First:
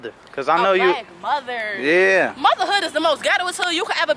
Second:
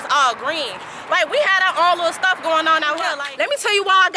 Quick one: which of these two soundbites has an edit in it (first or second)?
second